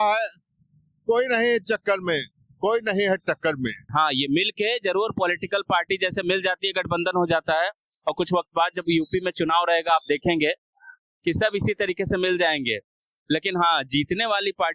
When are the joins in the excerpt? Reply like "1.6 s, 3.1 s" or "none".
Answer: 3.8 s